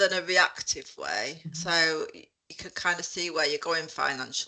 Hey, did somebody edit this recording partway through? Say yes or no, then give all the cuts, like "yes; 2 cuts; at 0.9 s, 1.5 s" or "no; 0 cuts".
no; 0 cuts